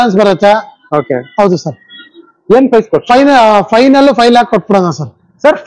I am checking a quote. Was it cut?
no; 0 cuts

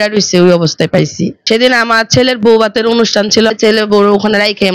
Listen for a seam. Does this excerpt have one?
yes; 1 cut; at 1.4 s

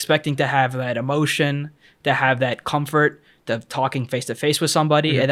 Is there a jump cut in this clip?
no; 0 cuts

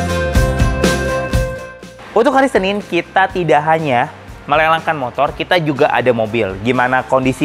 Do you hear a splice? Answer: yes; 1 cut; at 2.0 s

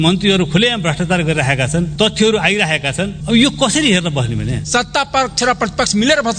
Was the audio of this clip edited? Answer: yes; 3 cuts; at 1.9 s, 3.2 s, 4.6 s

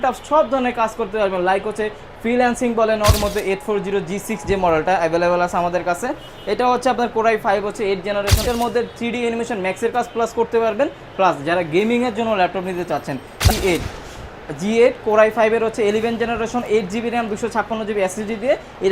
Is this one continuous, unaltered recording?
no; 3 cuts; at 3.2 s, 8.4 s, 13.5 s

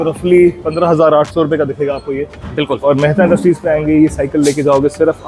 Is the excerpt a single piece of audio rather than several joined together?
yes; 0 cuts

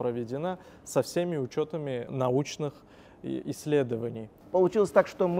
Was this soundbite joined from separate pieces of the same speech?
yes; 2 cuts; at 2.1 s, 4.3 s

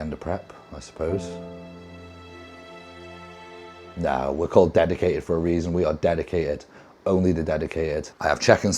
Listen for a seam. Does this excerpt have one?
no; 0 cuts

